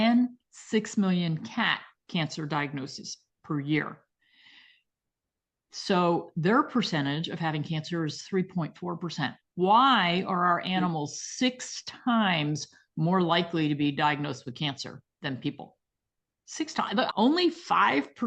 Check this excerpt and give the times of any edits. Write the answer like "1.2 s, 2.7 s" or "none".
17.1 s